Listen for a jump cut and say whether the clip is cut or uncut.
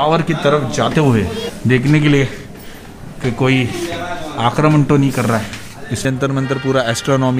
cut